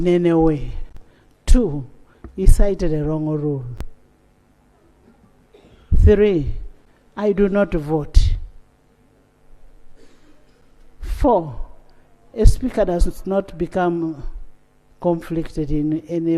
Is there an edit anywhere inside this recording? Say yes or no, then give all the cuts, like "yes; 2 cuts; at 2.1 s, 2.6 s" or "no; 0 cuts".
no; 0 cuts